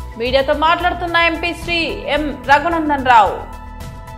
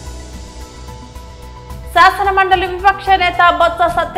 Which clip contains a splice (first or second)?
second